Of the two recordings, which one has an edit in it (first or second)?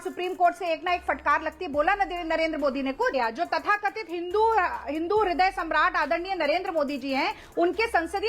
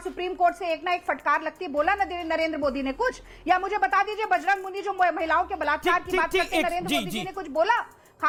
first